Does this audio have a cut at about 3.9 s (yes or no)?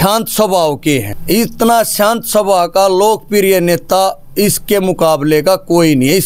no